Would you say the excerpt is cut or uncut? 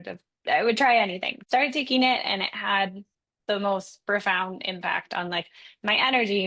cut